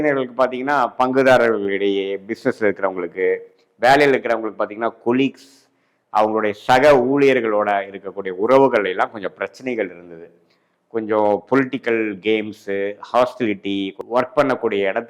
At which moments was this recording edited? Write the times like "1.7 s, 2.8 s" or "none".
none